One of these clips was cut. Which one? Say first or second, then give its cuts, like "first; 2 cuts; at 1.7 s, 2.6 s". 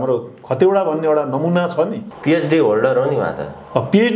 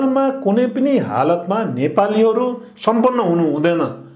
first; 1 cut; at 2.1 s